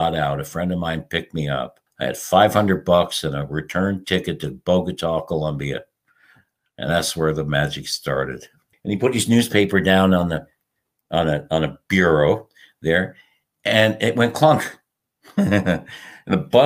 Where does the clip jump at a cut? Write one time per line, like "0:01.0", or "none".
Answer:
0:01.8
0:08.7